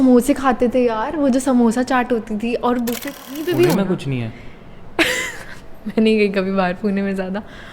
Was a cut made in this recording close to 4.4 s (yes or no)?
no